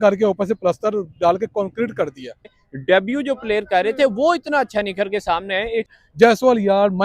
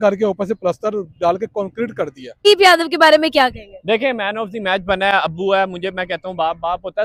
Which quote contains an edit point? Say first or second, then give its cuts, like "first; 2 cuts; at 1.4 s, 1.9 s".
first; 2 cuts; at 2.4 s, 6.0 s